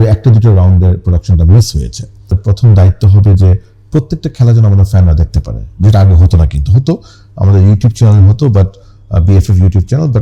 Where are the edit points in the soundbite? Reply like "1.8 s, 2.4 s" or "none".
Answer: 2.4 s